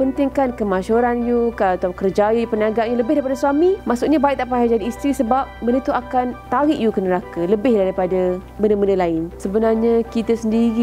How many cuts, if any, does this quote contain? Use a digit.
4